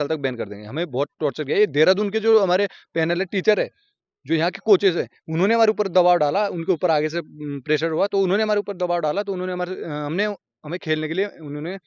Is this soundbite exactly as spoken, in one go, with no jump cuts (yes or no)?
yes